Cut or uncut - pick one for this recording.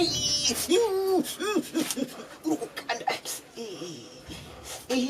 uncut